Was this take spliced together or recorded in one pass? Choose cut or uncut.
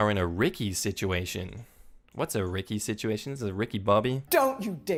uncut